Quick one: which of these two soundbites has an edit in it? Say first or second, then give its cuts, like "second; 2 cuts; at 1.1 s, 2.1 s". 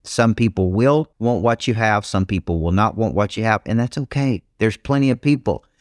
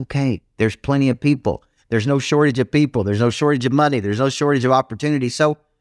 first; 1 cut; at 1.1 s